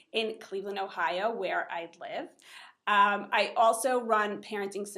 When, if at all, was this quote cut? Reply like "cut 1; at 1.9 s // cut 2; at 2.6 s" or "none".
cut 1; at 0.9 s